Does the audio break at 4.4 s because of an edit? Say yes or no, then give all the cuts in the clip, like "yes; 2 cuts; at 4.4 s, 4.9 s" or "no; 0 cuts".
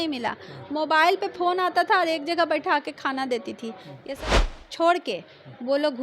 yes; 1 cut; at 4.4 s